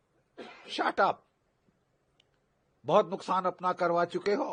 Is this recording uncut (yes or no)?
yes